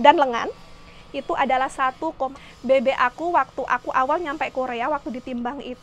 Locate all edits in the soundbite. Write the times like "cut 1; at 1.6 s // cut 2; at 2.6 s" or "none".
cut 1; at 2.4 s